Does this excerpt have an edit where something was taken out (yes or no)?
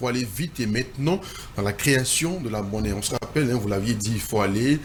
no